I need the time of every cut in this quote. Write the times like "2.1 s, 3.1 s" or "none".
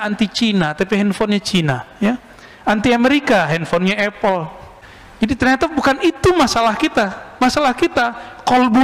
none